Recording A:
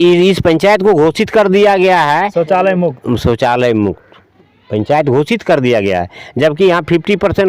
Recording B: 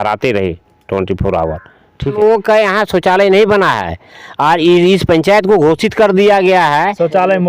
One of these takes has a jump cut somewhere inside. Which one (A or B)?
B